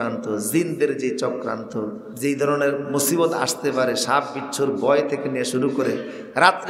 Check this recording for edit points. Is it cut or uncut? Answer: cut